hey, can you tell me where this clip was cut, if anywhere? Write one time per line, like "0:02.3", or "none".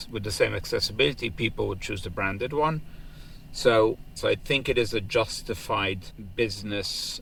none